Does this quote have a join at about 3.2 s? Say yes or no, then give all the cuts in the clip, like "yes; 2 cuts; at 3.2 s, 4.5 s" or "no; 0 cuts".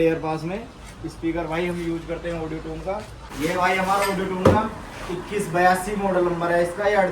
yes; 1 cut; at 3.2 s